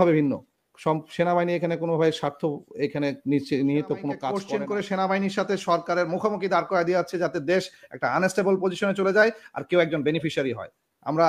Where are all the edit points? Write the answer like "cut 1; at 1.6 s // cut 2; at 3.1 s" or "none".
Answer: cut 1; at 4.3 s